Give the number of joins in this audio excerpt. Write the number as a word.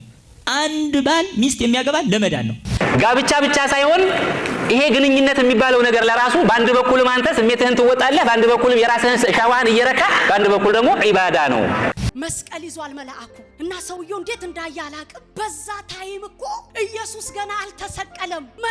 two